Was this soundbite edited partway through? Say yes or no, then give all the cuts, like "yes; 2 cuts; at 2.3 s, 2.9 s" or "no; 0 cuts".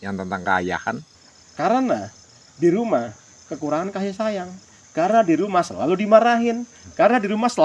yes; 1 cut; at 1.1 s